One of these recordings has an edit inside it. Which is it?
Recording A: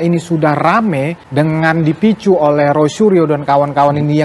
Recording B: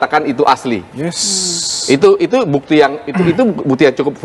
A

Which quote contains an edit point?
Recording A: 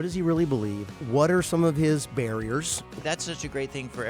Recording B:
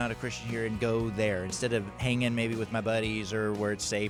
A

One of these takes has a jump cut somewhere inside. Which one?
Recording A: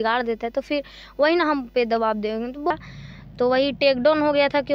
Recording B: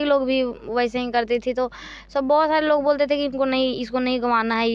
A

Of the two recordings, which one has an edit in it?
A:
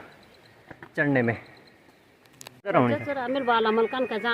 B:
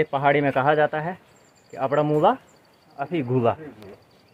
A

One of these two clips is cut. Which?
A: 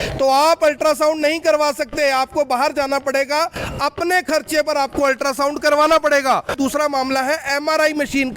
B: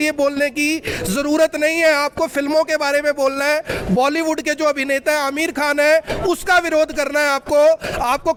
A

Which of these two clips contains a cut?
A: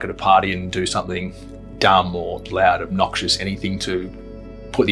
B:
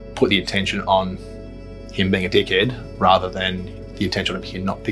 A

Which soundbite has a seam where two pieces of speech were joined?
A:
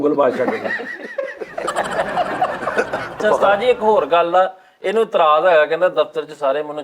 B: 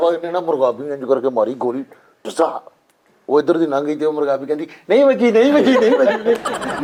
A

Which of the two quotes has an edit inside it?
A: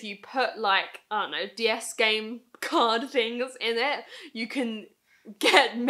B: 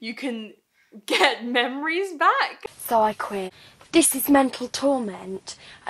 B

